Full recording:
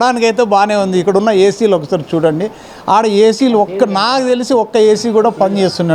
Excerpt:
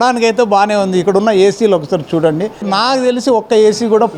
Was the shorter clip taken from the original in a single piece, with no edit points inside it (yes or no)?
no